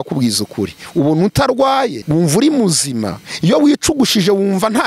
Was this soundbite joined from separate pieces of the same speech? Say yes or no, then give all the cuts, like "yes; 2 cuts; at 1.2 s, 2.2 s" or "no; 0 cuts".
yes; 2 cuts; at 2.0 s, 3.2 s